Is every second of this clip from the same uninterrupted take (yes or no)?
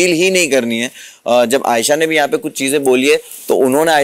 yes